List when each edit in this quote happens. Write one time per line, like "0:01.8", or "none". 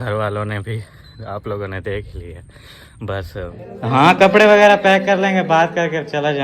0:03.6